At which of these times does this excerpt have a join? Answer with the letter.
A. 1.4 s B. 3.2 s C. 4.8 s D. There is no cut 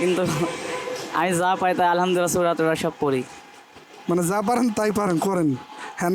D